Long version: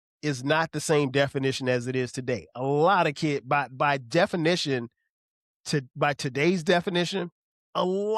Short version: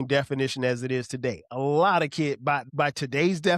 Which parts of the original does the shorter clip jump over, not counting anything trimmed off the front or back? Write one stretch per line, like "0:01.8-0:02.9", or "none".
0:03.7-0:05.9